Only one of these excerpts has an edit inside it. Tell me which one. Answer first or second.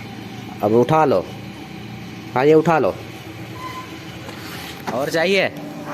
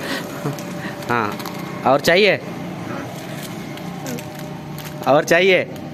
first